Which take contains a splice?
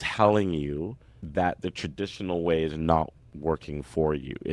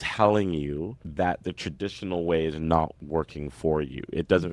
second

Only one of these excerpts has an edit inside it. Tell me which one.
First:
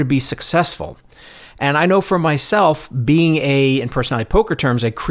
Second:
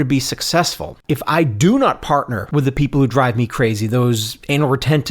second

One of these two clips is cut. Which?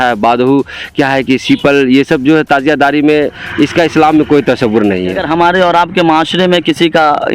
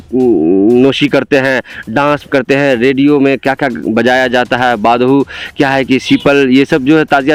first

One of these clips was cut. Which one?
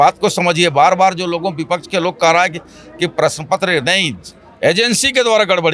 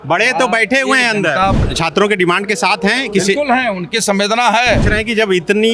second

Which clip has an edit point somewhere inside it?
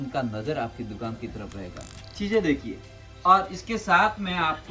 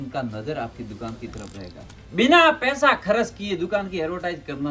first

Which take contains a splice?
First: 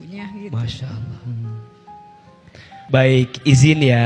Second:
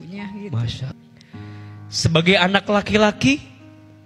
second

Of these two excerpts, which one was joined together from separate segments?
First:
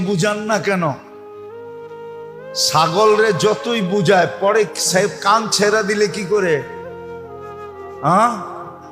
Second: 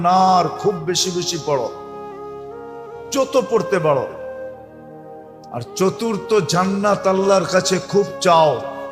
second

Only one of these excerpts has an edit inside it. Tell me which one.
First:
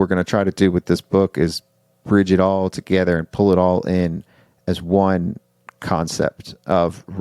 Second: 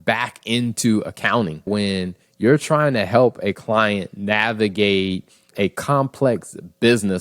second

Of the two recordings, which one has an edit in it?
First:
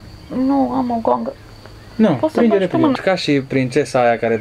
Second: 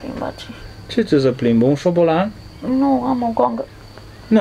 first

